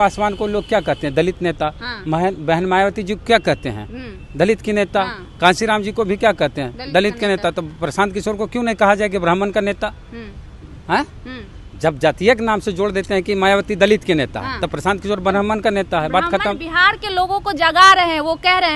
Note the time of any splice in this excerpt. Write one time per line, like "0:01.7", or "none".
none